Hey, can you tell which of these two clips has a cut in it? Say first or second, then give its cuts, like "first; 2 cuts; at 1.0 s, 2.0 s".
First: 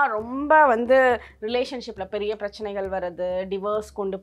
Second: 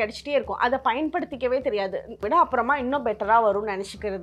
second; 1 cut; at 2.1 s